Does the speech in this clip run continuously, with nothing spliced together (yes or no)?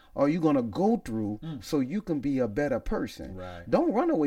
yes